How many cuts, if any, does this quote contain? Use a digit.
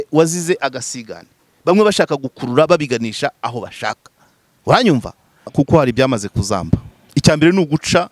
1